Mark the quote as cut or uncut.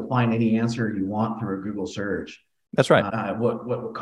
uncut